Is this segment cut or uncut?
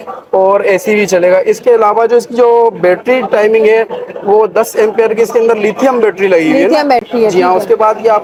uncut